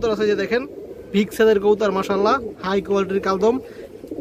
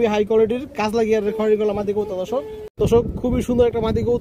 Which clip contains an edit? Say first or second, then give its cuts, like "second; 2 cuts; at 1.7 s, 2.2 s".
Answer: second; 1 cut; at 2.6 s